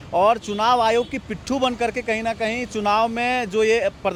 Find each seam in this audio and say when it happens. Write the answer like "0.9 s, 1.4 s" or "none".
none